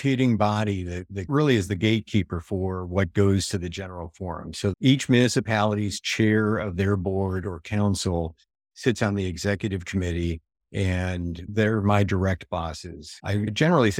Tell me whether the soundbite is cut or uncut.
cut